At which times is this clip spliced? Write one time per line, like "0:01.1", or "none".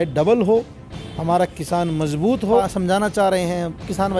0:02.6